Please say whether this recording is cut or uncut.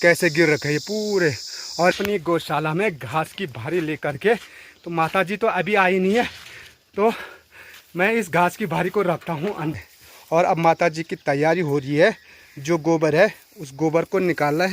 cut